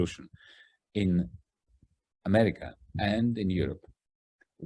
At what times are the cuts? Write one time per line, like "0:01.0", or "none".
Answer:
none